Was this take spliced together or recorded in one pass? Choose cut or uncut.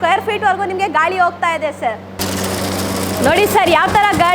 cut